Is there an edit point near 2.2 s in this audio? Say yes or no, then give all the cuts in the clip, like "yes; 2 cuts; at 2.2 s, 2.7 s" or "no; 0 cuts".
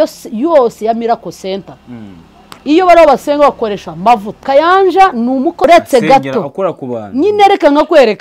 no; 2 cuts; at 4.3 s, 5.6 s